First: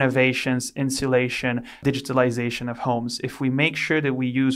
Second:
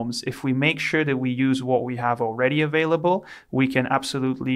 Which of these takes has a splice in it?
first; 1 cut; at 1.8 s

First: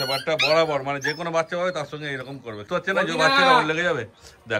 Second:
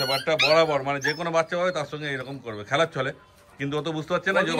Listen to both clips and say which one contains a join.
first; 1 cut; at 2.6 s

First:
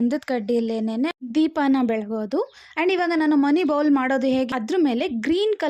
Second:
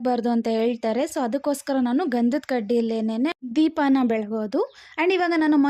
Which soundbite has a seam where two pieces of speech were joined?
first; 1 cut; at 4.5 s

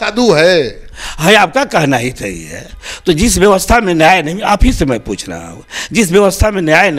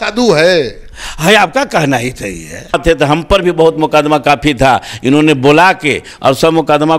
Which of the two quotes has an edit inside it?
second; 1 cut; at 2.8 s

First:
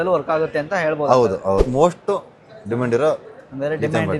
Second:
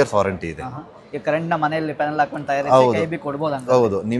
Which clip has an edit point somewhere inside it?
first; 1 cut; at 1.6 s

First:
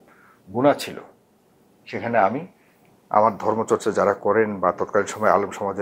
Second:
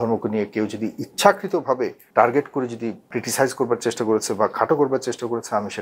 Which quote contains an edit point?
second; 2 cuts; at 2.0 s, 3.1 s

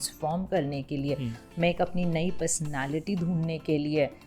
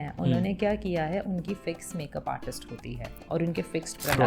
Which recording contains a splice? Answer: second; 1 cut; at 3.2 s

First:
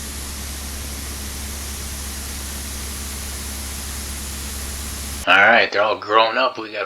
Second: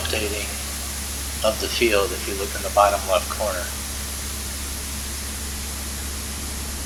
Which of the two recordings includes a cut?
first; 1 cut; at 5.2 s

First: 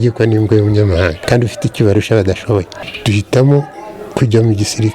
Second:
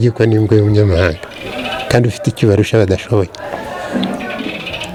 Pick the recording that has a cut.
first; 2 cuts; at 1.2 s, 2.8 s

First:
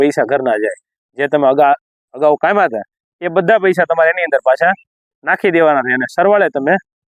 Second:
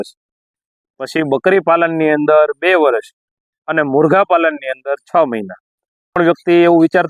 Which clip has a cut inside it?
second; 1 cut; at 6.2 s

